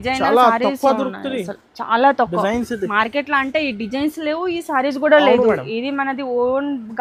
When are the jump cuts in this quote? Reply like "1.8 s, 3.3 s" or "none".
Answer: none